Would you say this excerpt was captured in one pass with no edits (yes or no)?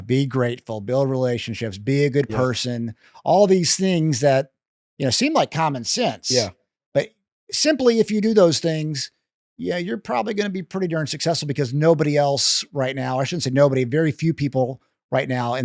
yes